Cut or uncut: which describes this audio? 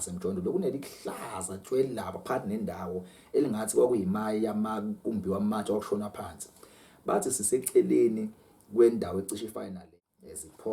cut